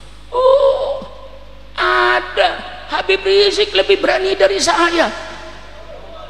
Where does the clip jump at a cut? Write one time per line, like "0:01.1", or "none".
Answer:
none